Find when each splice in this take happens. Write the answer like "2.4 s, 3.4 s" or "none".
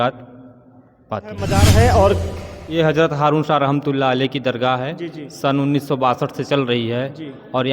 1.5 s

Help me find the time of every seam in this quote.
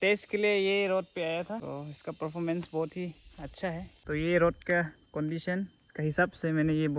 1.6 s, 3.9 s

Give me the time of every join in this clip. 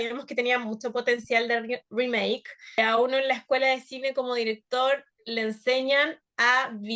2.8 s

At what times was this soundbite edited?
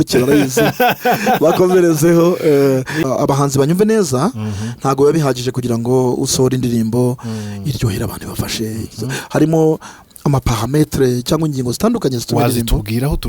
3.0 s

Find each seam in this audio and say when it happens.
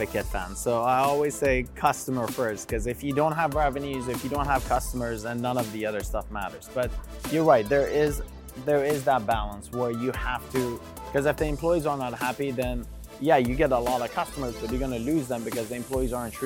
none

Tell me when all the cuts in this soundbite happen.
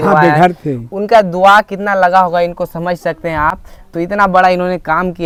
none

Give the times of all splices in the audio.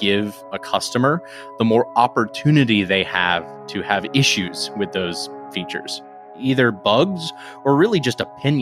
6.2 s

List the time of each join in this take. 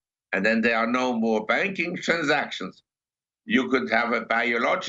none

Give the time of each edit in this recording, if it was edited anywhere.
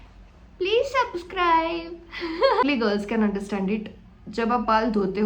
2.6 s

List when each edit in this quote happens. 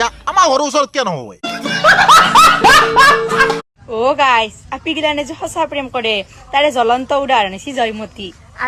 none

